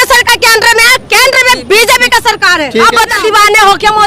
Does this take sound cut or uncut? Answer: cut